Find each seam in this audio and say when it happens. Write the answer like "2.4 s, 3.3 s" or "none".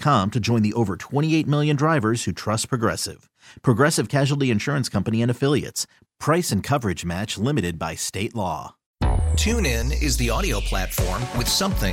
8.8 s